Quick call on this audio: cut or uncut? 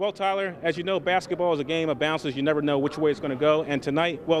uncut